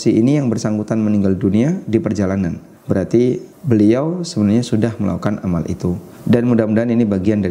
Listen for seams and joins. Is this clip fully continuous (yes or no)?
no